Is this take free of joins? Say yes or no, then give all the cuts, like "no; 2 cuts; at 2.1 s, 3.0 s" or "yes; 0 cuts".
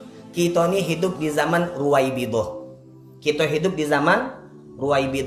yes; 0 cuts